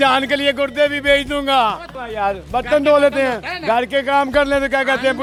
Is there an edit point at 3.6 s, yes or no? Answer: no